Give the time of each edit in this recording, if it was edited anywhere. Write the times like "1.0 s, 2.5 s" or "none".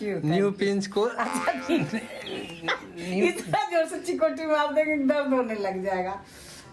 none